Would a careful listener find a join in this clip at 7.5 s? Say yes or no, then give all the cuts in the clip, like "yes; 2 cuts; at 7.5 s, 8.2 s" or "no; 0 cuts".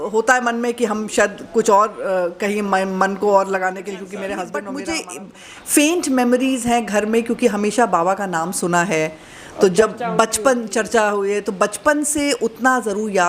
no; 1 cut; at 4.7 s